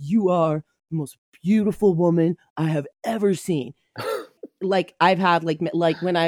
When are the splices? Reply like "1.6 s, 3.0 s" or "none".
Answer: 4.4 s